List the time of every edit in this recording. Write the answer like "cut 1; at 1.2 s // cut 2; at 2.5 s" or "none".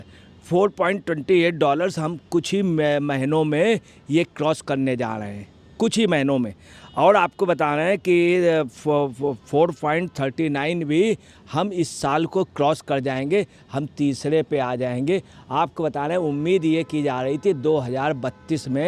none

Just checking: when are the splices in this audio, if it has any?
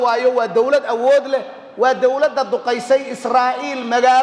none

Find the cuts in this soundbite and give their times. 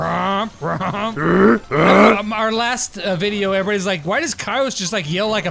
cut 1; at 1.2 s

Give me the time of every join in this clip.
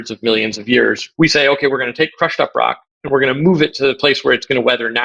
cut 1; at 1.1 s

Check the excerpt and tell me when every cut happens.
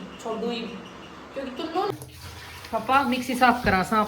cut 1; at 1.9 s

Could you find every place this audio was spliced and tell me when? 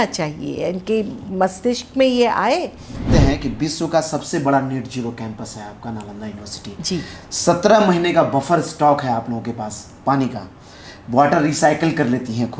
cut 1; at 3.1 s

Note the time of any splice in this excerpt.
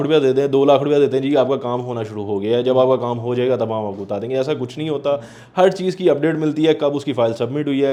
none

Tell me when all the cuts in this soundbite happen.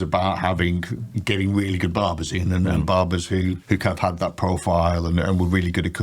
cut 1; at 3.6 s

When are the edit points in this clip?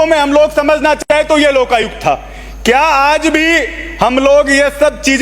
none

